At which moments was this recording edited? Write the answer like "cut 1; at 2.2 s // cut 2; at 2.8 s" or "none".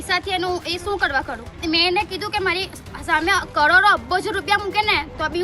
cut 1; at 1.6 s